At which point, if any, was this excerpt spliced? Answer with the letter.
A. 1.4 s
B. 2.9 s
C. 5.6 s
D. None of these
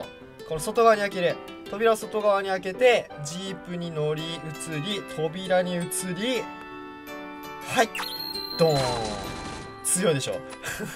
D